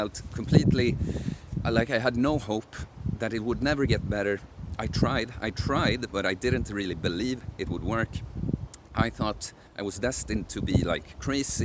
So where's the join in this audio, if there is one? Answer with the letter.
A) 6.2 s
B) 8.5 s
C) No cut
C